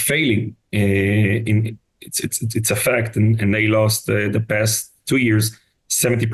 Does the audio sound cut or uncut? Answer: uncut